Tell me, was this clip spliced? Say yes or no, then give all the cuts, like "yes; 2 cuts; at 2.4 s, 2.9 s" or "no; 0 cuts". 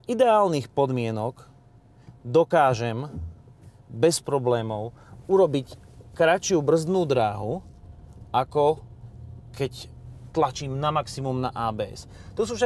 yes; 1 cut; at 11.8 s